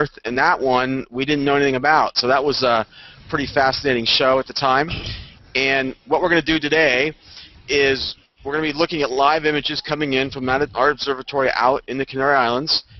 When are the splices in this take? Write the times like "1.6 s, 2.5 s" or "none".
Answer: none